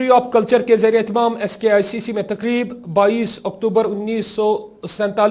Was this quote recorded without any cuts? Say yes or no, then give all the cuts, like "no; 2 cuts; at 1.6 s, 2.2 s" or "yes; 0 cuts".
yes; 0 cuts